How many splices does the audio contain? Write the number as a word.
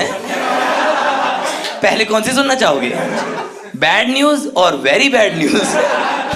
zero